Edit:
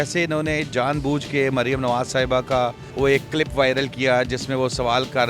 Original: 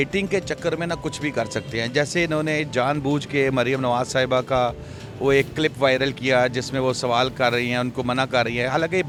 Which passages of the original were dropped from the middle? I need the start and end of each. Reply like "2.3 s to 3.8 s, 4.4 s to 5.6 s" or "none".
4.8 s to 5.1 s